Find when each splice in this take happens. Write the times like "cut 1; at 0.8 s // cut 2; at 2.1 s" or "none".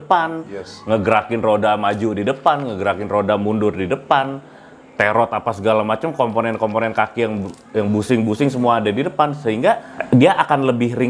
cut 1; at 9.9 s